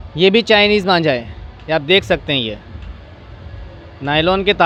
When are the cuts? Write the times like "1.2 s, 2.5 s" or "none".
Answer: none